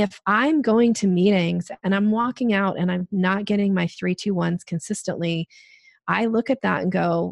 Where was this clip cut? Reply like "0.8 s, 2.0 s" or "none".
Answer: none